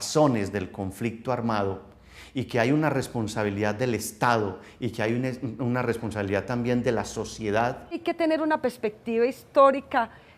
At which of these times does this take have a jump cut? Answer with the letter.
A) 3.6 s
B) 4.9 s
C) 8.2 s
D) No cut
C